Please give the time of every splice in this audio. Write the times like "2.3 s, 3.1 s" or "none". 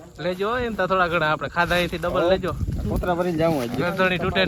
none